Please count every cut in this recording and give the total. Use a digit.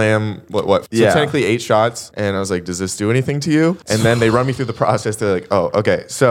3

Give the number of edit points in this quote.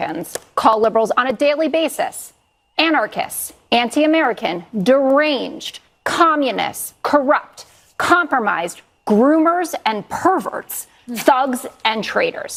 0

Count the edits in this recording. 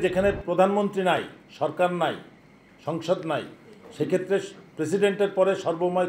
0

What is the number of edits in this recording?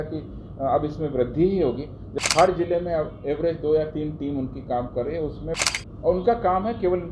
2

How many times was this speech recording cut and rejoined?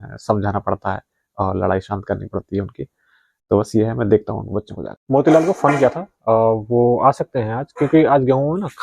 1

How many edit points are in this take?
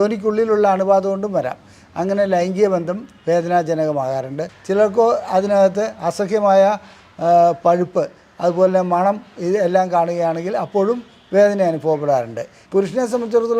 2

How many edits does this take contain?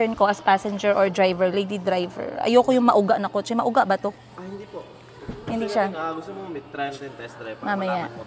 0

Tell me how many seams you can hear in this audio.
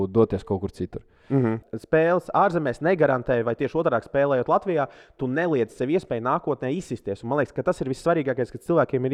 1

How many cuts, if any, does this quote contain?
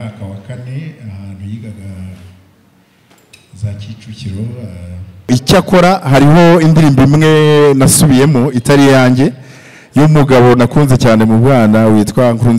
1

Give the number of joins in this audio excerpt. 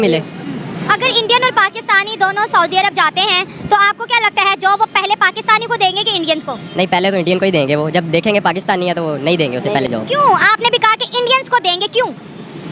0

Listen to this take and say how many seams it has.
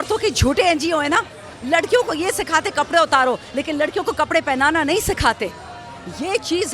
0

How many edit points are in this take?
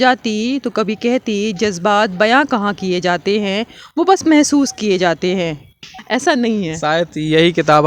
1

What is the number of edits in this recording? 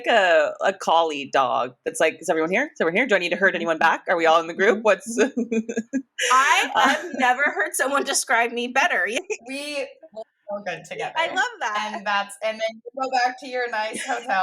1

